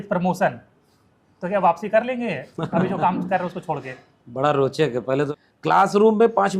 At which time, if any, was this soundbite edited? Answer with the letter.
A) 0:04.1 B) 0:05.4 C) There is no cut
B